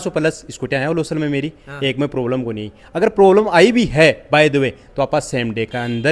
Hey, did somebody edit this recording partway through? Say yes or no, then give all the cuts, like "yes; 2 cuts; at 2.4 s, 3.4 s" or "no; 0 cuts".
no; 0 cuts